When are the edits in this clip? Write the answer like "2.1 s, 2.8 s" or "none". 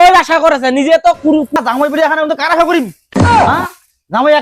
1.5 s

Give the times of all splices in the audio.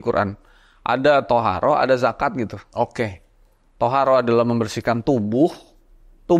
none

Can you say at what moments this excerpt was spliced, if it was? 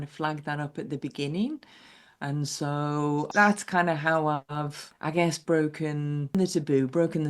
3.3 s, 6.3 s

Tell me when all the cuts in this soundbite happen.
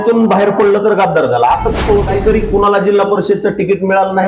2.1 s

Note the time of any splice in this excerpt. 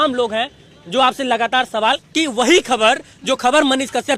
2.0 s

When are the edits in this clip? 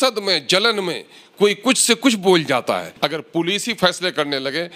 2.9 s

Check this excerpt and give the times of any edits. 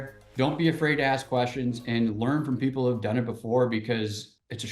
none

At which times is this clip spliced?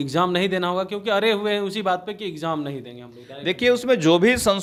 none

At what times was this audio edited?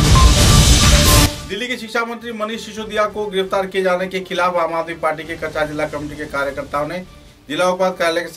1.4 s

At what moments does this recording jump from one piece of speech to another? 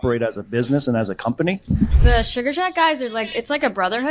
2.0 s

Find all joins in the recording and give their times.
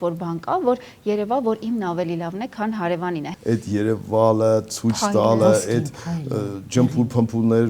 3.3 s

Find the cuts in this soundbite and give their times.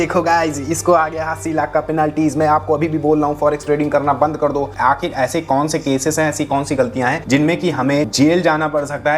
4.7 s, 7.2 s, 8.1 s

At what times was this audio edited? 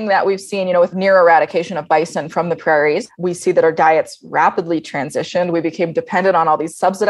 0.9 s, 3.1 s

